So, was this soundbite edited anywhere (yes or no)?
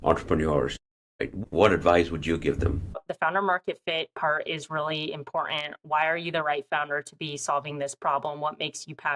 yes